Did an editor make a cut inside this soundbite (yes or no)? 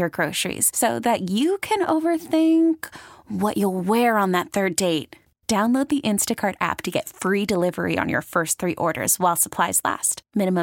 no